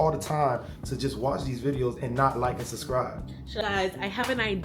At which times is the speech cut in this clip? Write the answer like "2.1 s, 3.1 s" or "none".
3.6 s